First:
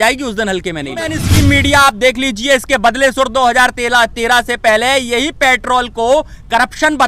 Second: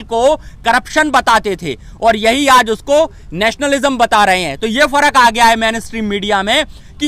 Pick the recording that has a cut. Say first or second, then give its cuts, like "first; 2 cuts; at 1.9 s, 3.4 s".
first; 1 cut; at 1.2 s